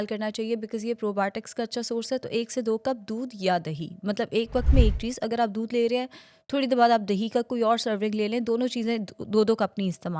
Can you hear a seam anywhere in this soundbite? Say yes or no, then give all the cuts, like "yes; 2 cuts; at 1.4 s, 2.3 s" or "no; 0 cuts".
no; 0 cuts